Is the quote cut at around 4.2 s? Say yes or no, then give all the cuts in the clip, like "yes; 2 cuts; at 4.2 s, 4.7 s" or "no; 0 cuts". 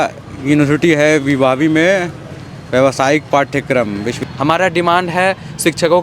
yes; 1 cut; at 4.2 s